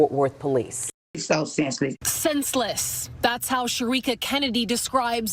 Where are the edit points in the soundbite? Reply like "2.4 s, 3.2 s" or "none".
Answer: 1.2 s